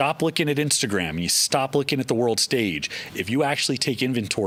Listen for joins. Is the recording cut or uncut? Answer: uncut